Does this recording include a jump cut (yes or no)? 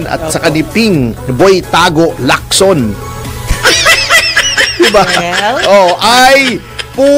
no